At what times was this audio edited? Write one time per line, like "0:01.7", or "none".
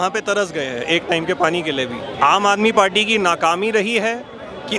0:02.1